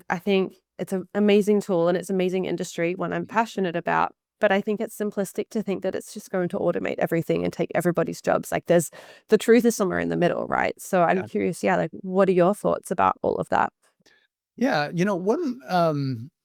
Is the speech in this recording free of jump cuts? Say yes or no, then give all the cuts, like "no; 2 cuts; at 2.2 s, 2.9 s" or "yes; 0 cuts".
yes; 0 cuts